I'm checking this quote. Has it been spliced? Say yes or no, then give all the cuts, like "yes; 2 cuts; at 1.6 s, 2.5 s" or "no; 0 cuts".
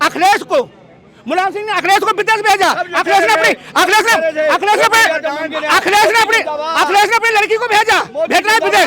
no; 0 cuts